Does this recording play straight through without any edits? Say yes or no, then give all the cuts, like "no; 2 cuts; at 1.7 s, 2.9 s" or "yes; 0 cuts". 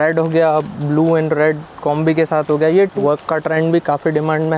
no; 1 cut; at 2.9 s